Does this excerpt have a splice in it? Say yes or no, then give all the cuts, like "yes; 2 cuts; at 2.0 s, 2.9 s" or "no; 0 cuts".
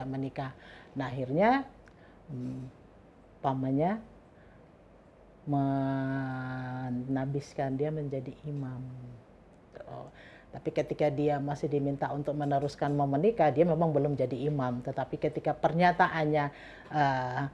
no; 0 cuts